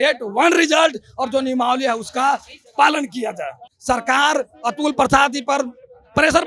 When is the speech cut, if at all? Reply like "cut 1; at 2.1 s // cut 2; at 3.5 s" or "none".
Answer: cut 1; at 3.8 s